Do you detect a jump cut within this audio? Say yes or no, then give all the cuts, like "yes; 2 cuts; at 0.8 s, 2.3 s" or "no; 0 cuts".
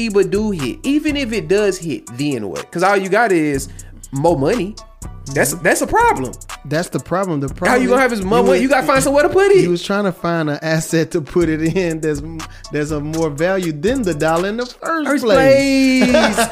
no; 0 cuts